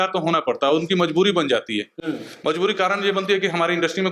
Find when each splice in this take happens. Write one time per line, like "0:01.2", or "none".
none